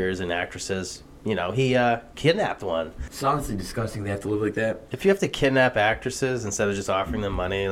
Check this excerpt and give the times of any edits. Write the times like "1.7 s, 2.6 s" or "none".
3.0 s